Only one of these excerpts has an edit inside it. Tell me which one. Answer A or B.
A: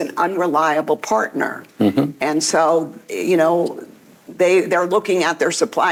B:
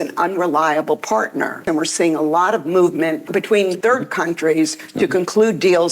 B